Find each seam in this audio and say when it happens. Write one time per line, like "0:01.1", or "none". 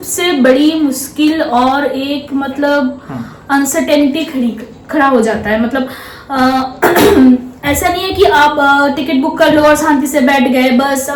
none